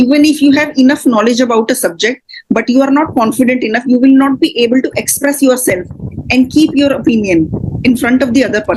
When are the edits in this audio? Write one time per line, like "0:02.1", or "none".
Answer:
none